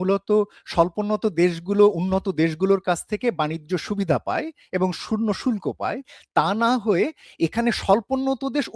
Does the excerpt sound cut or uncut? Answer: uncut